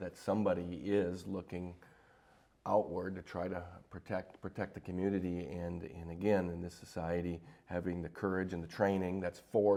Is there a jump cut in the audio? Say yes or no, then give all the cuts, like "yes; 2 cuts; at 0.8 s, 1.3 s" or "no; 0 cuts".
no; 0 cuts